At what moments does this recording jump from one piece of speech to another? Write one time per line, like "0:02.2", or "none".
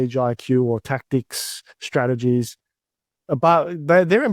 none